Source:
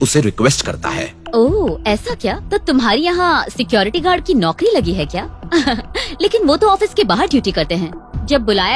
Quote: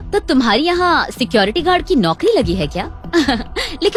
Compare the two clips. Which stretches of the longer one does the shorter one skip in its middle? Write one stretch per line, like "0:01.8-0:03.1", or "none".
none